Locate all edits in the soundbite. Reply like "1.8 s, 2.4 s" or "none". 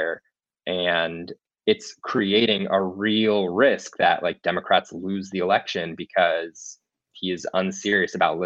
1.3 s